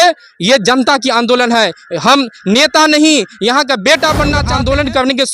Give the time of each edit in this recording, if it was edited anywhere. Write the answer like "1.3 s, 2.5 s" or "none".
4.4 s